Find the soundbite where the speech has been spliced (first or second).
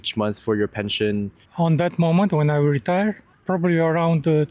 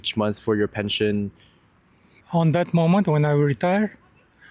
first